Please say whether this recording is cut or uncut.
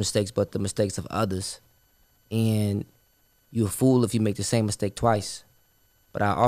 uncut